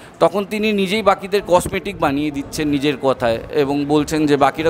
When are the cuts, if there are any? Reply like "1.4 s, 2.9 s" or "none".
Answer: none